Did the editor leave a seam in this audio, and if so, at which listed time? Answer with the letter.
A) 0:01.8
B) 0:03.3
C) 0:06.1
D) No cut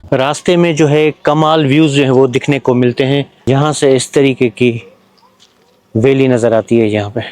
B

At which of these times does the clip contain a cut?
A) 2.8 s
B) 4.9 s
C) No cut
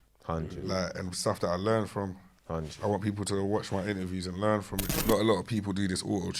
B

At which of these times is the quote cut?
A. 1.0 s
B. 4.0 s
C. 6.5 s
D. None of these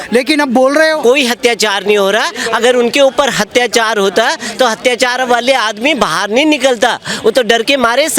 A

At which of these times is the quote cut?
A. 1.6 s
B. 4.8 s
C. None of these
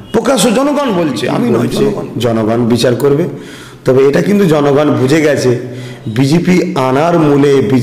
A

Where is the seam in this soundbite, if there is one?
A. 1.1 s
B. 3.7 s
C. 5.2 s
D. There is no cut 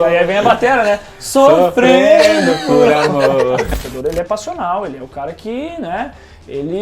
B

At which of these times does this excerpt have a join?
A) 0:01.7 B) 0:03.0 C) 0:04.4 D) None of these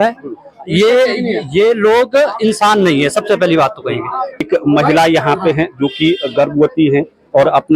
C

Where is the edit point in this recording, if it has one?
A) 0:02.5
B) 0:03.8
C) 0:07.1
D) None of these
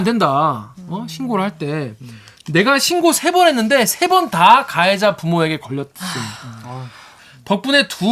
C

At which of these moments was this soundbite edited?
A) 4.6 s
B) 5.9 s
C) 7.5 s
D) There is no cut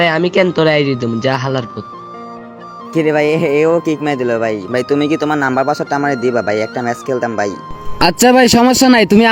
A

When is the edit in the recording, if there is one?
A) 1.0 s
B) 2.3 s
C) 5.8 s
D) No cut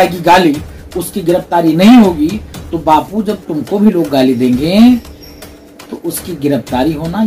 D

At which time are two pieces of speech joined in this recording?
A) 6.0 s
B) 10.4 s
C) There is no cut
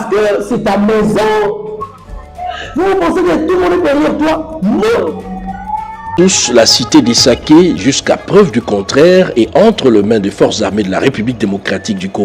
A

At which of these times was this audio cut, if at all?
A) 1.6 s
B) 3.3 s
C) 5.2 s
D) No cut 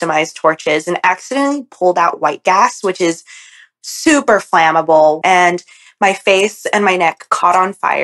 C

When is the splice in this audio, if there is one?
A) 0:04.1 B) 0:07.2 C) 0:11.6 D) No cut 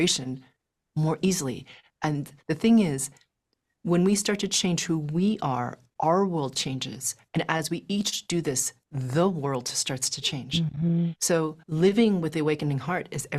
C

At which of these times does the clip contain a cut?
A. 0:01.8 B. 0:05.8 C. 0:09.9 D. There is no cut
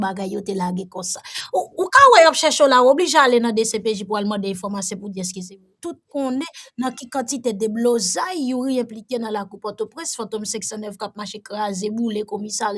B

